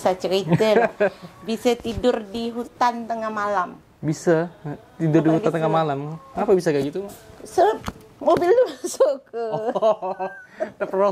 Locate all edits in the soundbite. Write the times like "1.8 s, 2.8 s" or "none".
none